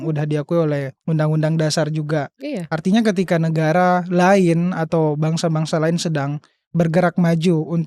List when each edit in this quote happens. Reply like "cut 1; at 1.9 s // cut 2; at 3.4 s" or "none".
cut 1; at 0.9 s